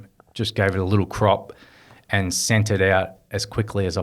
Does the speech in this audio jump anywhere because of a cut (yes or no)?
no